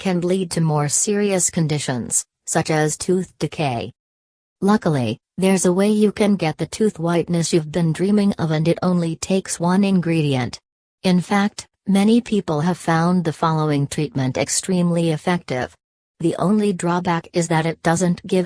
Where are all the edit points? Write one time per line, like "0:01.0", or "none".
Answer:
0:08.6